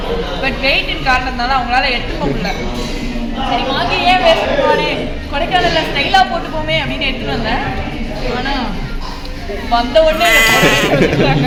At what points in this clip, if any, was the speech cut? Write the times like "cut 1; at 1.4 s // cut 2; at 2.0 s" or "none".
none